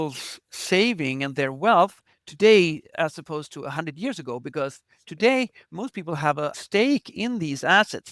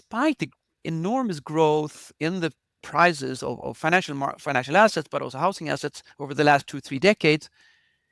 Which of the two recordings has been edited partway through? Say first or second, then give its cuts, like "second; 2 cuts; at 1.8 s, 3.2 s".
first; 1 cut; at 6.6 s